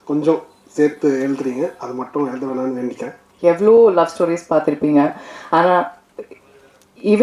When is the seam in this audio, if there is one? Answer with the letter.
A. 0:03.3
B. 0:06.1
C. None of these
A